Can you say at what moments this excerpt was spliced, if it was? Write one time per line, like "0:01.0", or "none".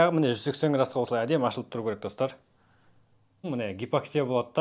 0:03.5